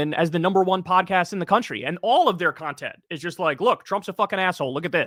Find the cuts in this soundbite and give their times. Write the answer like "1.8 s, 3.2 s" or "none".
none